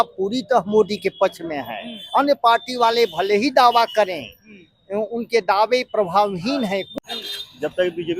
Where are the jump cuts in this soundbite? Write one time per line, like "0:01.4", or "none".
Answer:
0:06.9